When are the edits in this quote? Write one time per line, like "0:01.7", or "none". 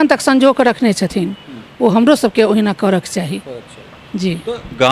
none